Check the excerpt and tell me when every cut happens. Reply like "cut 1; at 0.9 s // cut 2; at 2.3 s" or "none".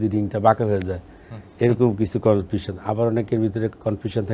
none